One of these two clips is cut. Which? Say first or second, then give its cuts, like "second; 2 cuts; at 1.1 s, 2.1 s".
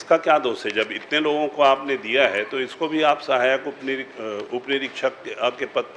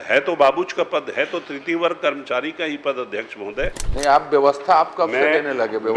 second; 1 cut; at 3.8 s